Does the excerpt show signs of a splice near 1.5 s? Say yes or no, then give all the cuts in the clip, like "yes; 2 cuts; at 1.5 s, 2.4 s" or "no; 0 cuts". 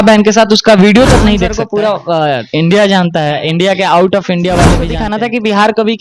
yes; 2 cuts; at 1.5 s, 5.0 s